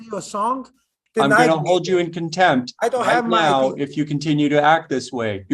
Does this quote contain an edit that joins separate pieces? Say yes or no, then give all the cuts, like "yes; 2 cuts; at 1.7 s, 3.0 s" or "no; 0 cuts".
yes; 1 cut; at 1.0 s